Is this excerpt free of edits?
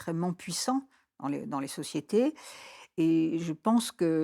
yes; 0 cuts

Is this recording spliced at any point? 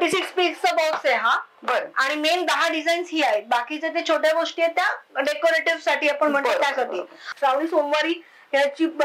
yes; 1 cut; at 7.2 s

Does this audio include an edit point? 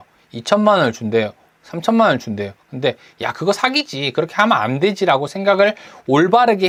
no; 0 cuts

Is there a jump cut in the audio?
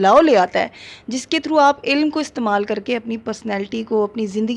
no; 0 cuts

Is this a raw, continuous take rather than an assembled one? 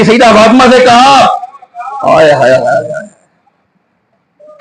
yes; 0 cuts

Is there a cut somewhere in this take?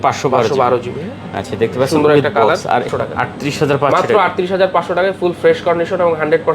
yes; 1 cut; at 2.9 s

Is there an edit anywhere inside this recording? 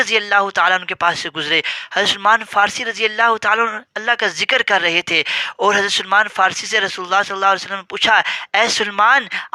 no; 0 cuts

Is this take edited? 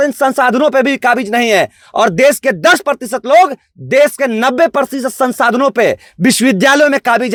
no; 0 cuts

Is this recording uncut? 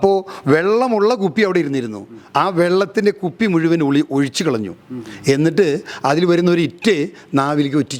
yes; 0 cuts

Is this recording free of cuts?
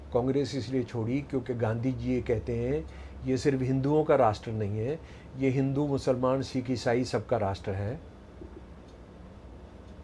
yes; 0 cuts

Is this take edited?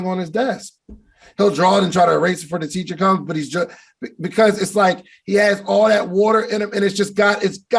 no; 0 cuts

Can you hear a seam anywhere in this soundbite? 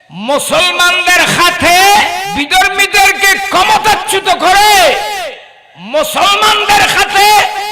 yes; 1 cut; at 2.3 s

